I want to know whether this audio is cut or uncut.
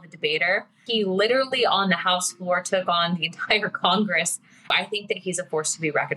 cut